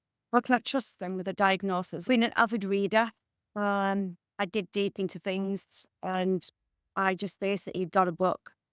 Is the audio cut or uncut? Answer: cut